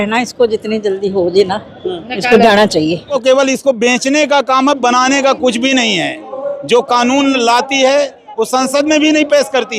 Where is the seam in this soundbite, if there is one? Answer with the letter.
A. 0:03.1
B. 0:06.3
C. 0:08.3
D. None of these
A